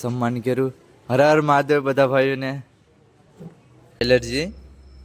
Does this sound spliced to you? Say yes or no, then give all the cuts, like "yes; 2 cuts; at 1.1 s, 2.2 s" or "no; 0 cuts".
yes; 1 cut; at 4.0 s